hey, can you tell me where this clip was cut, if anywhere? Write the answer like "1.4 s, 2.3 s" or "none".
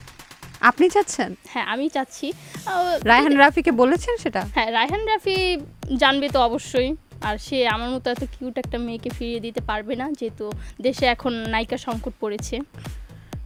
none